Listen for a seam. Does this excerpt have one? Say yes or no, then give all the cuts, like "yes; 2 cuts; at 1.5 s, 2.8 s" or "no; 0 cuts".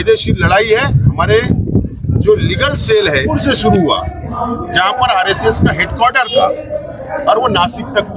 yes; 1 cut; at 3.3 s